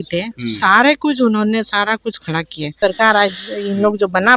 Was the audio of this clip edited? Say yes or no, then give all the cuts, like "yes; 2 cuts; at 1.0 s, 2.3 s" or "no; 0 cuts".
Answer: yes; 1 cut; at 2.8 s